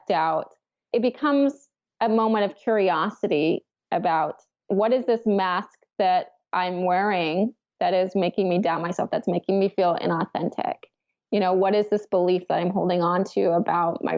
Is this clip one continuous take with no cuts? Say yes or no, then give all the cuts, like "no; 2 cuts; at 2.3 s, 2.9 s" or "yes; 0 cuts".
yes; 0 cuts